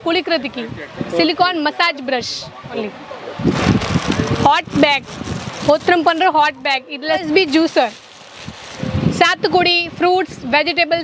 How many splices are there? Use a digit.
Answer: 3